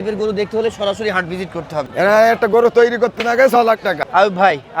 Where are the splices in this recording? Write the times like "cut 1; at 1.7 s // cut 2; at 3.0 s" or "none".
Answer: cut 1; at 1.9 s // cut 2; at 4.0 s